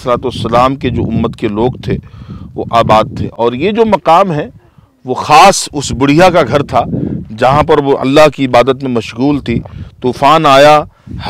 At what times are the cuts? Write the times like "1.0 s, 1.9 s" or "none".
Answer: none